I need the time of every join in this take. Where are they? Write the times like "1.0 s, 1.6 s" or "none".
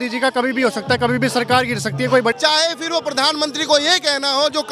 2.3 s

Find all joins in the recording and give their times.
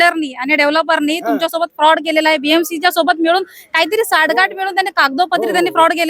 none

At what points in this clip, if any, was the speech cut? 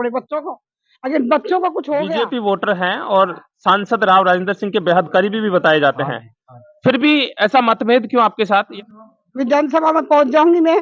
2.1 s, 8.7 s

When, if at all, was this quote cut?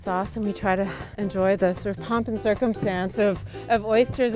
none

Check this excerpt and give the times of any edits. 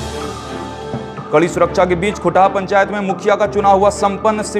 1.2 s

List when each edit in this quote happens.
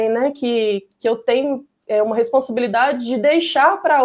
none

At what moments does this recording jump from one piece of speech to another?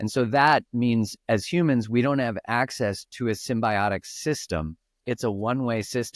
none

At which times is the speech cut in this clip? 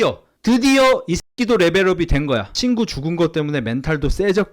2.5 s

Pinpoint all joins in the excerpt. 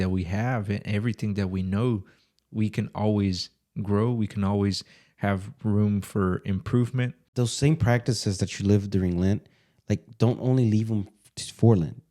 7.2 s

